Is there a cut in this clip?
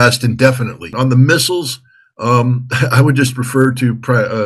yes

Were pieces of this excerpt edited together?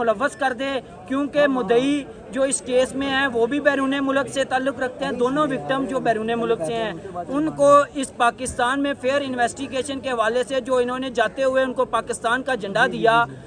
no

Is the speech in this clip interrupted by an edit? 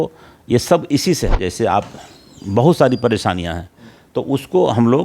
yes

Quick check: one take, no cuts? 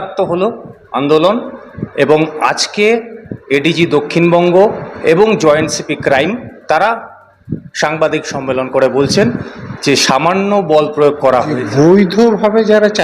no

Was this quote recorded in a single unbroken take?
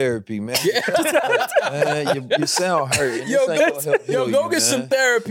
yes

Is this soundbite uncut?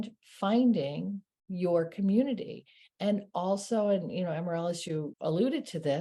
no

